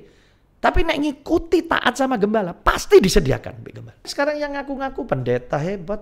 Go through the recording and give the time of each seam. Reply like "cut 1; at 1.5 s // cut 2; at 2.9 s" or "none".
cut 1; at 4.1 s

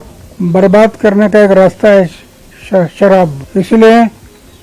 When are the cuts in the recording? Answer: cut 1; at 3.4 s

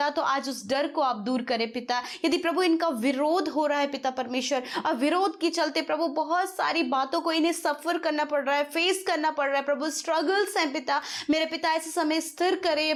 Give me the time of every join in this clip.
none

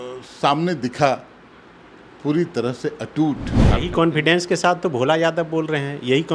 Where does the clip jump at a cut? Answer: cut 1; at 3.5 s

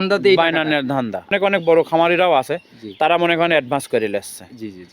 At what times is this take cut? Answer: cut 1; at 1.3 s

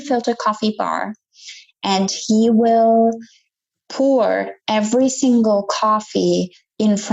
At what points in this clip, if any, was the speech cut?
none

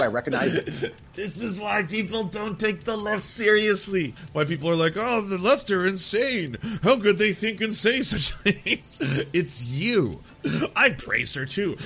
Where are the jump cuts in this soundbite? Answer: cut 1; at 4.2 s // cut 2; at 10.3 s

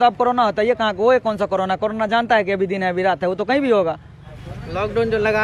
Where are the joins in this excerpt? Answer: cut 1; at 4.2 s

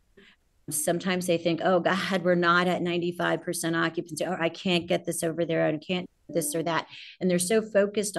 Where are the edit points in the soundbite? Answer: none

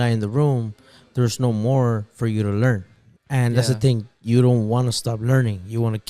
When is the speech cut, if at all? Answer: none

